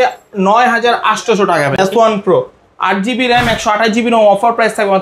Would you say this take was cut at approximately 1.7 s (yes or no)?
yes